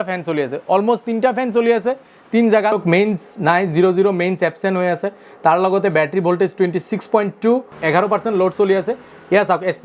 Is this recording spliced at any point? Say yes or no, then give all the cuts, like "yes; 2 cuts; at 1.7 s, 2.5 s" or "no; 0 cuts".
yes; 2 cuts; at 2.7 s, 7.7 s